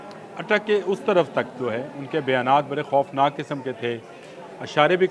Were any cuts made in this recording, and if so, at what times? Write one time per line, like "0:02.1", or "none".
none